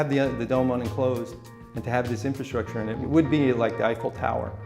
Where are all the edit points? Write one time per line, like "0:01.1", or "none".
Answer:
0:03.0